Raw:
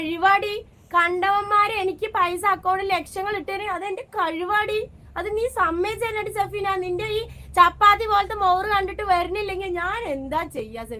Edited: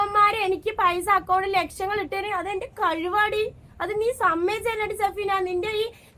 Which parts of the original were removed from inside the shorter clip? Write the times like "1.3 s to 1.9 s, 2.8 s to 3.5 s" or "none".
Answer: none